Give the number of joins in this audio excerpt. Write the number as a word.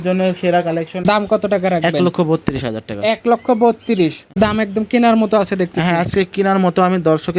two